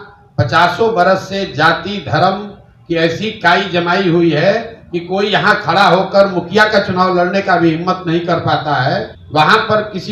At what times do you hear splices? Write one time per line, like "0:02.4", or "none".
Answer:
0:09.2